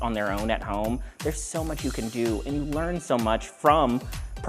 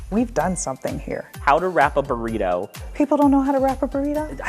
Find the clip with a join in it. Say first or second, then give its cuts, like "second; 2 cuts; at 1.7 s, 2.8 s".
second; 2 cuts; at 1.3 s, 2.8 s